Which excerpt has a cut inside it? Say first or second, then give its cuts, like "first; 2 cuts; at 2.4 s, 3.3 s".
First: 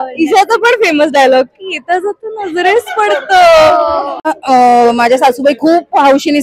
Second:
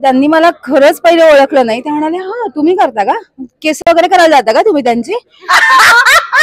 first; 1 cut; at 4.3 s